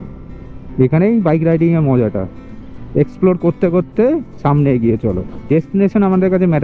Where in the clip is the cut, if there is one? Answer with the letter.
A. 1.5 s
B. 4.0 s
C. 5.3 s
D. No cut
C